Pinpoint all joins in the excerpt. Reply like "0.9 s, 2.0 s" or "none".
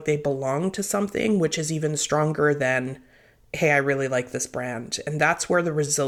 none